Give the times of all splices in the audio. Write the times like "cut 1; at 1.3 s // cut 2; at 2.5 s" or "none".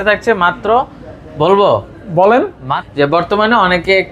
cut 1; at 2.8 s